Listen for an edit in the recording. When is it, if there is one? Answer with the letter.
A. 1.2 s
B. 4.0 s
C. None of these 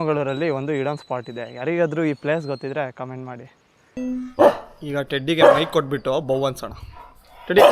B